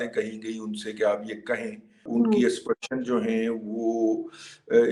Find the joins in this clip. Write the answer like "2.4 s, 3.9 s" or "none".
2.0 s